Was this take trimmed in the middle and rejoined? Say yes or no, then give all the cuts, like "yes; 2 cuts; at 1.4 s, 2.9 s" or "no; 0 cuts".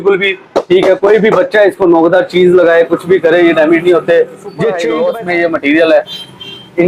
yes; 1 cut; at 4.8 s